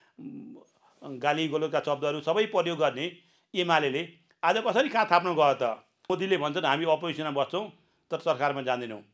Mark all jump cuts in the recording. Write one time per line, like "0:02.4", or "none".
0:06.1